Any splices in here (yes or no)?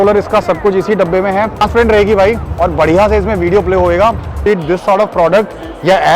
yes